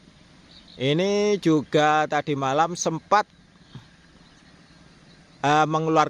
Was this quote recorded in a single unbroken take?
yes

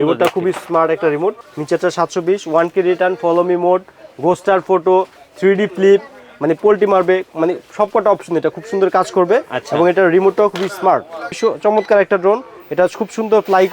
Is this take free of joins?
no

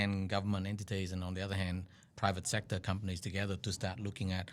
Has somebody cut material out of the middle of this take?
yes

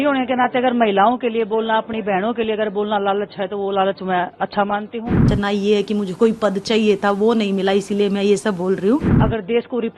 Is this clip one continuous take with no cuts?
no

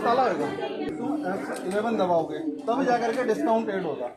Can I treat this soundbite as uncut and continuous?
no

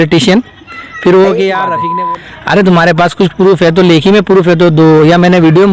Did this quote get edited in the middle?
yes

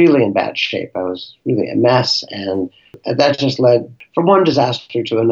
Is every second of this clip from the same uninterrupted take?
no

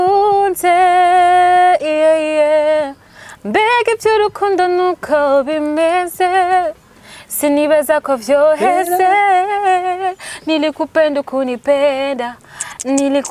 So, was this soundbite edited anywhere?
no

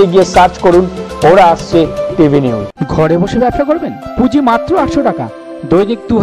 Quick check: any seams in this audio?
yes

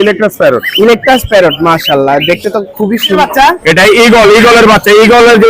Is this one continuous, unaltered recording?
no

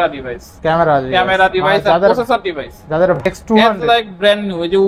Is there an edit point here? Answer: yes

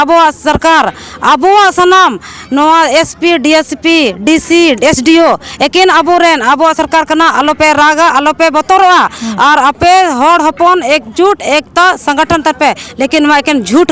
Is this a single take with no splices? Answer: yes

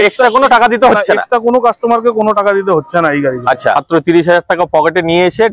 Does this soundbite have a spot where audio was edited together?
yes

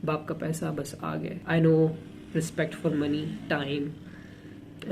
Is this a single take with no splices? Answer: no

